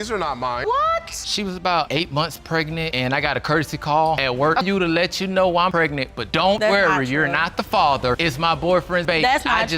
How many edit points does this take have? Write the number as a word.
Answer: two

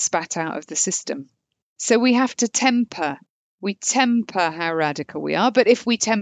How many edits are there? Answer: one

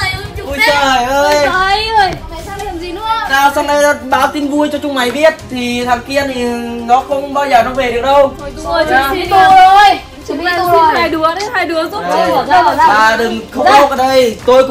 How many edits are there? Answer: zero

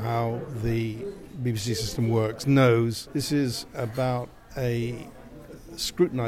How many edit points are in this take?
one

